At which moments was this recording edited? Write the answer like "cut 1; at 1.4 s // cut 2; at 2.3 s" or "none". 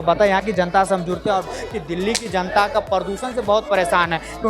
cut 1; at 1.5 s